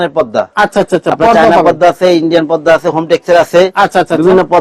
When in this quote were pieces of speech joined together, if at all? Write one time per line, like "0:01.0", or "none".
none